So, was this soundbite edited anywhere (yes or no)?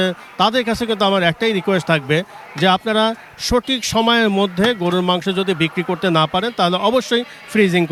no